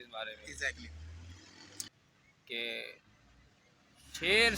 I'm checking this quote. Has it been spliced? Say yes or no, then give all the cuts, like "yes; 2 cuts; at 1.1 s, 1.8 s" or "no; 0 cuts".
yes; 1 cut; at 2.1 s